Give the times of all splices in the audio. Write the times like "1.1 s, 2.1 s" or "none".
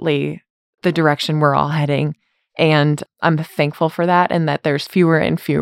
3.0 s